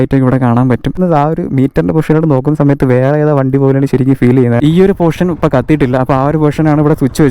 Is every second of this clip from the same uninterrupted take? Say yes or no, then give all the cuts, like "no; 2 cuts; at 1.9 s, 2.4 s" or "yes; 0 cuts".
no; 2 cuts; at 1.0 s, 4.6 s